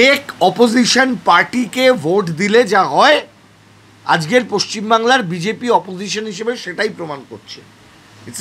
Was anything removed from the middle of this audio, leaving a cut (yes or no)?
no